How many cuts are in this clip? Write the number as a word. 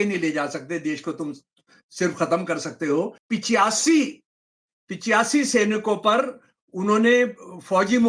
one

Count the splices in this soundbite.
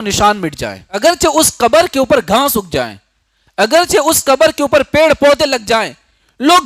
one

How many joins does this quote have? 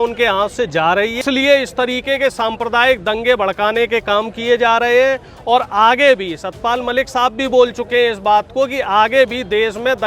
one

